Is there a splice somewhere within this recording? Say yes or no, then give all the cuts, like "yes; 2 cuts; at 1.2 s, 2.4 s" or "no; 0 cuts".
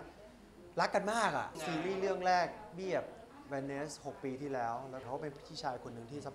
yes; 2 cuts; at 1.6 s, 5.0 s